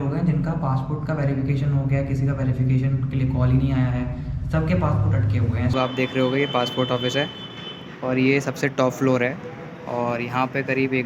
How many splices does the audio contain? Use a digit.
1